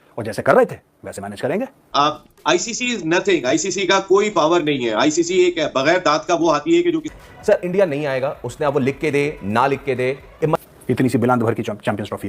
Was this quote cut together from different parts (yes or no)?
yes